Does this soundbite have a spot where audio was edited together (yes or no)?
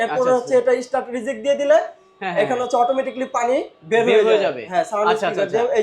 no